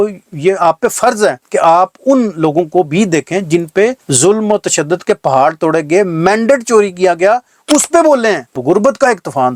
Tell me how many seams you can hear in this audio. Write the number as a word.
one